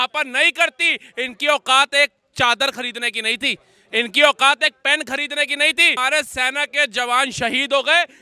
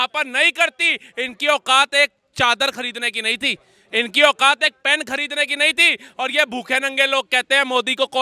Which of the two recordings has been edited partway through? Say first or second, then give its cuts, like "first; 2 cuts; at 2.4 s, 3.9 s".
first; 1 cut; at 6.0 s